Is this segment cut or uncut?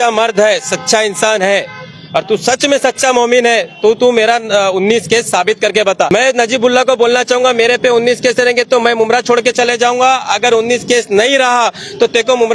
cut